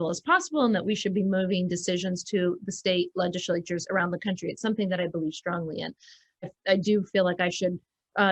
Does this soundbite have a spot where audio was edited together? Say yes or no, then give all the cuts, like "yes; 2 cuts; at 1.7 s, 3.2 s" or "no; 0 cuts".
yes; 1 cut; at 6.5 s